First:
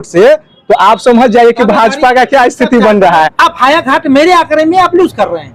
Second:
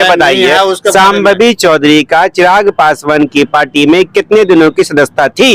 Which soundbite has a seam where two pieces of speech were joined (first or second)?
first